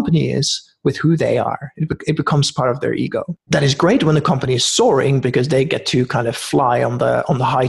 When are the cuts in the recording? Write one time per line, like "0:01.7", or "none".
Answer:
0:03.4

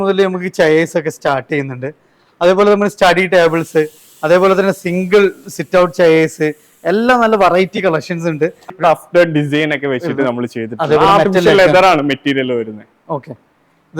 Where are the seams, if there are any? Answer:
0:08.7

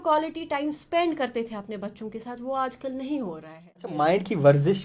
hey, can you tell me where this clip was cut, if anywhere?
0:03.9

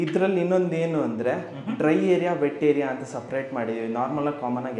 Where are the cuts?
none

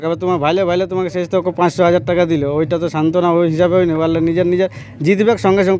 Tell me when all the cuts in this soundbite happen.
none

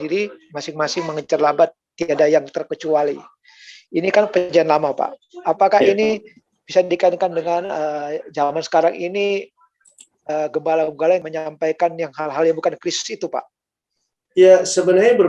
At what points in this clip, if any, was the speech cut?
0:11.3

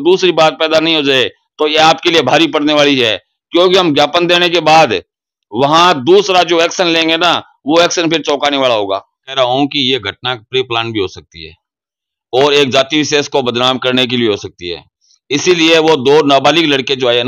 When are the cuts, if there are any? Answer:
0:09.2

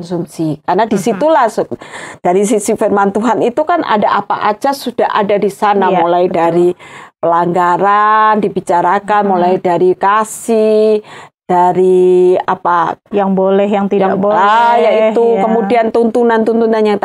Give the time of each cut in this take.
none

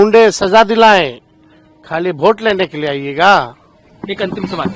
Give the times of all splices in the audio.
none

